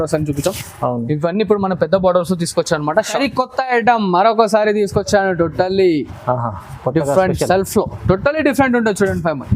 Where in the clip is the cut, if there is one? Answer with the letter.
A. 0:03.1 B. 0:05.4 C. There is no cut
A